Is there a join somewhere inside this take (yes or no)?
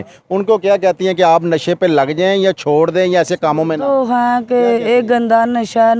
no